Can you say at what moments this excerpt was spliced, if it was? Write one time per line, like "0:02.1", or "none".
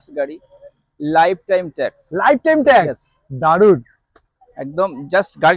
none